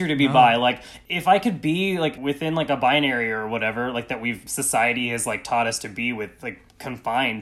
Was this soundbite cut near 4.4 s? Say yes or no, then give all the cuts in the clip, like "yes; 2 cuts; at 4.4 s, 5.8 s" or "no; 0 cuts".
yes; 3 cuts; at 0.9 s, 2.2 s, 4.4 s